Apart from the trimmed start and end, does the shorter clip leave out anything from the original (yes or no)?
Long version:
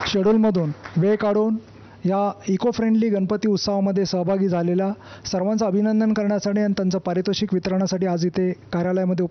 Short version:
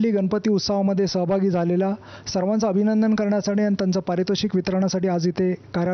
no